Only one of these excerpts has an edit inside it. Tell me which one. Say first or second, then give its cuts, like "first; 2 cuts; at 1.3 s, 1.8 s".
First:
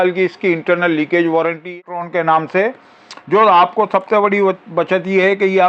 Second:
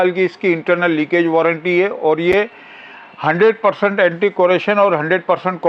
first; 1 cut; at 1.7 s